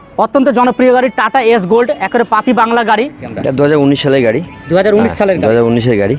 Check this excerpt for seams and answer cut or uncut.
cut